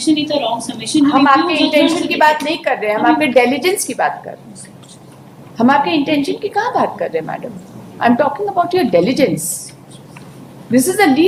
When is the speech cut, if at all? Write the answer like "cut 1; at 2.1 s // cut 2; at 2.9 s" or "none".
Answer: none